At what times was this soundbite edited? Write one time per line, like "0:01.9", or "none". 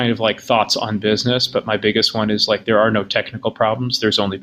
none

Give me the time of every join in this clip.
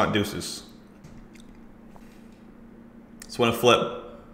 0:01.0
0:02.0

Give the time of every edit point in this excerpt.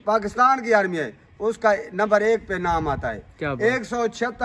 none

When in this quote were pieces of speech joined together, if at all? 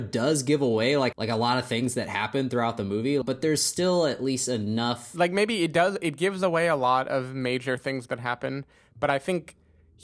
0:01.1
0:03.2
0:05.0

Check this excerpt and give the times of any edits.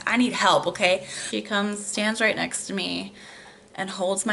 0:01.1

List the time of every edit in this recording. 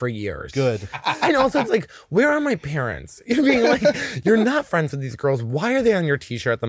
0:01.0

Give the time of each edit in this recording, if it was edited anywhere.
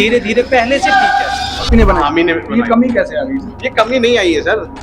0:01.7

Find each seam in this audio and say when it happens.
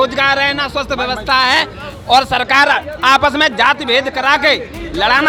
none

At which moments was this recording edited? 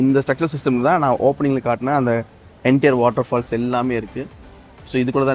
none

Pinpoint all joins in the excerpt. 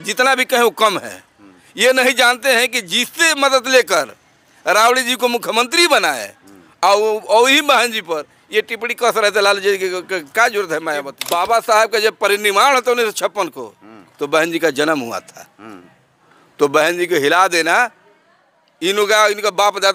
0:11.2

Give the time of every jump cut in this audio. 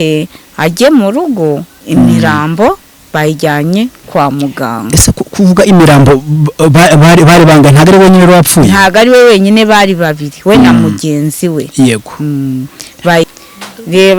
0:13.3

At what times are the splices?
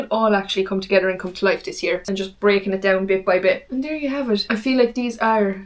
0:02.0

